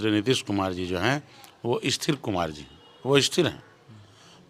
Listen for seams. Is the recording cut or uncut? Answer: uncut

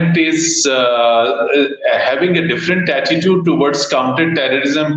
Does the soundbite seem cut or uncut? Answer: uncut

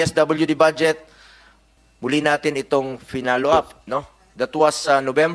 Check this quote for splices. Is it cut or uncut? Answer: uncut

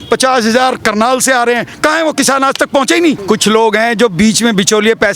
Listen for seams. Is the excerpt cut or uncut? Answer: cut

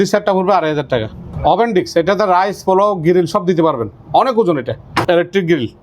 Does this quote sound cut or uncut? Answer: cut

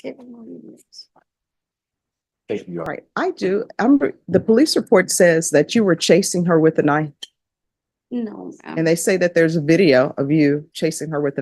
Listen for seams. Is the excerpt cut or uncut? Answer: cut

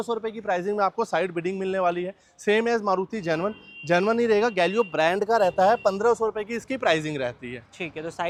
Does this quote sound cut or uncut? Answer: uncut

